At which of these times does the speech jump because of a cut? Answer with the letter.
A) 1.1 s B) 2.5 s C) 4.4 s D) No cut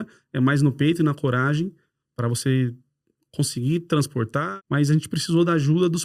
C